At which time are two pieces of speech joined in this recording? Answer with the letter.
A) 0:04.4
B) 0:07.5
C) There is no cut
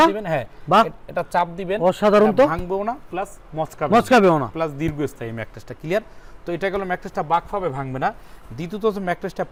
C